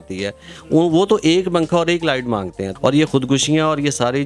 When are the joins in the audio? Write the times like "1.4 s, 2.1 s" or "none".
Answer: 2.6 s